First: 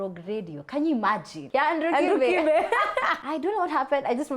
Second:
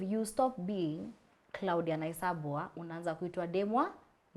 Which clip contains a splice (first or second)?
first